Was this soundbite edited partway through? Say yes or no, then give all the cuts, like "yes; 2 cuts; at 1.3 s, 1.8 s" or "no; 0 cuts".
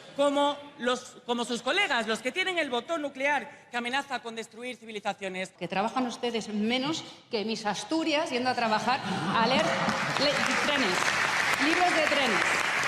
yes; 1 cut; at 5.5 s